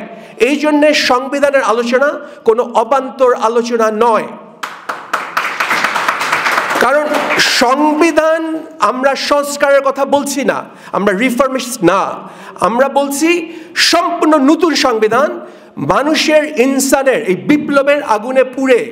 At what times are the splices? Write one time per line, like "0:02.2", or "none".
none